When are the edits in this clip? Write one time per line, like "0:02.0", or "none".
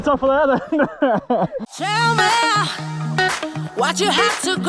0:01.7